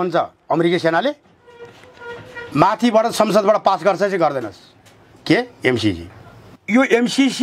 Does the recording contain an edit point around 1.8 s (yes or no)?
no